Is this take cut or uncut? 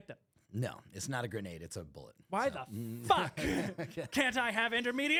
uncut